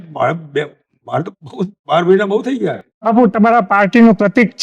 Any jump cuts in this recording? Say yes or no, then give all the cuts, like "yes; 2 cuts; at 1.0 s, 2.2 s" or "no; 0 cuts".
yes; 1 cut; at 2.9 s